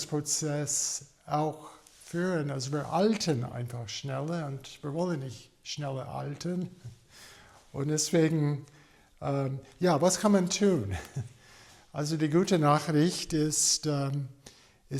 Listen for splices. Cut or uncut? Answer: uncut